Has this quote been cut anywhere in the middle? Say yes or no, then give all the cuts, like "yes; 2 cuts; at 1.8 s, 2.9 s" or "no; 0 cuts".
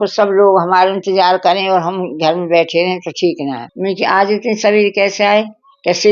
yes; 1 cut; at 3.7 s